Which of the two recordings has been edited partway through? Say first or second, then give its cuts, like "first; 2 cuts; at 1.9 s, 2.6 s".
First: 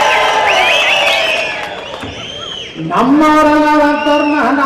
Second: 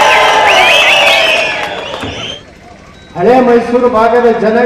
second; 1 cut; at 2.4 s